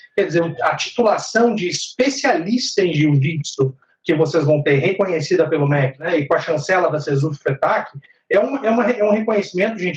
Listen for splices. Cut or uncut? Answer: cut